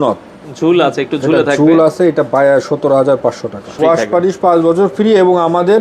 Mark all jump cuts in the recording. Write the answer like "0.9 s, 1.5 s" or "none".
3.7 s